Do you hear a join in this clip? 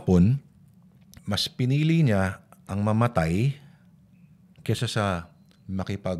yes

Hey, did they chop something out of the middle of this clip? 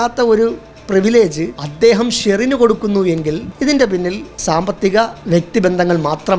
yes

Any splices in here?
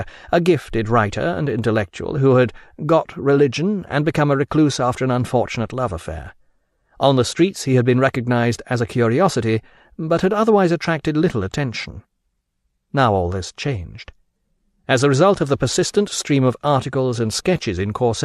no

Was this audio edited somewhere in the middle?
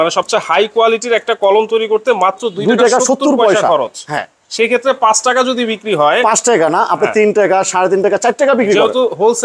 no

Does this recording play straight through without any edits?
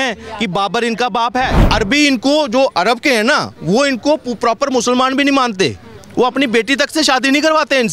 no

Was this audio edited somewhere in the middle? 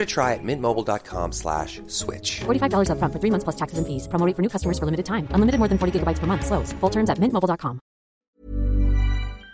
yes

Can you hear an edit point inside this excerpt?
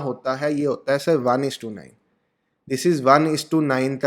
no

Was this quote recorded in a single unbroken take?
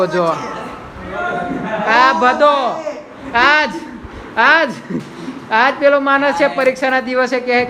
yes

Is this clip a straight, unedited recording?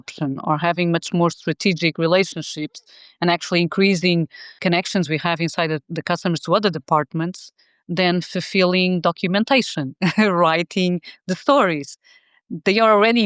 no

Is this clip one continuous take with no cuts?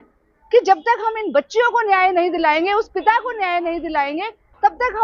yes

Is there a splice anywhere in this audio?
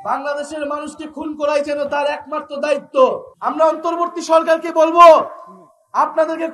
yes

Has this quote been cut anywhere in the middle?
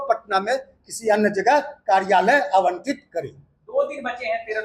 no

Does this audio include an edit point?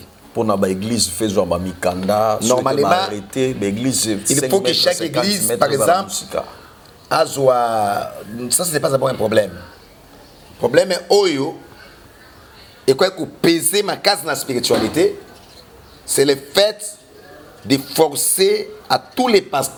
no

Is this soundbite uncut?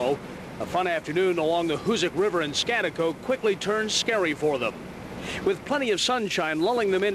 no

